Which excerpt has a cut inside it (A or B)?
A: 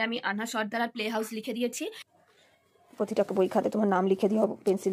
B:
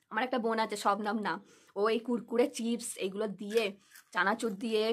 A